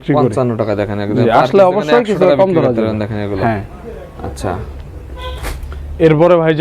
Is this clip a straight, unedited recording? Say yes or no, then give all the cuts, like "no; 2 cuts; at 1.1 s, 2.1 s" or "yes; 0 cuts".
yes; 0 cuts